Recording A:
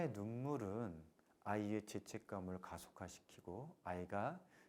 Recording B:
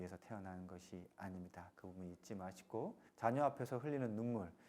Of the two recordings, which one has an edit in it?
B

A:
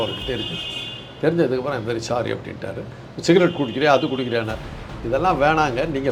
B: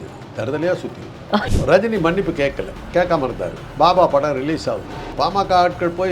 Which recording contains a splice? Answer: B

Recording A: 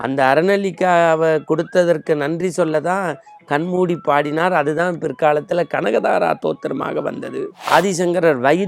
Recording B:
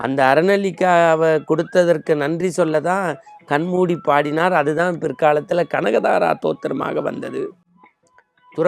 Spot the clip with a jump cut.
A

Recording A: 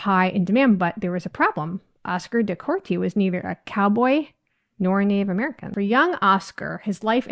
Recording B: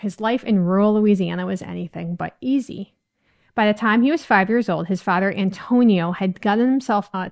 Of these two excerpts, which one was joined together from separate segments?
A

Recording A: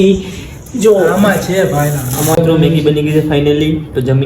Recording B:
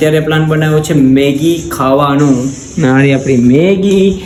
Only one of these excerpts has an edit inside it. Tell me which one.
A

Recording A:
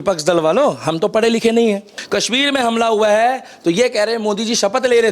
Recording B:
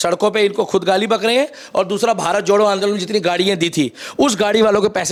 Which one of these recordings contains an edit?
A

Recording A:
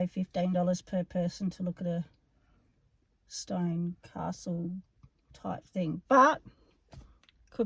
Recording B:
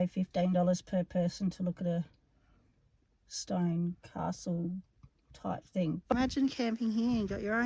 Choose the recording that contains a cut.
B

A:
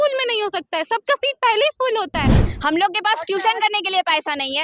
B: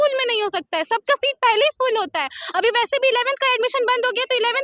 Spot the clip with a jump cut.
A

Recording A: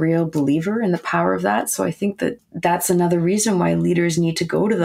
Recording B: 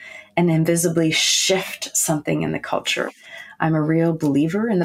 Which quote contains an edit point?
A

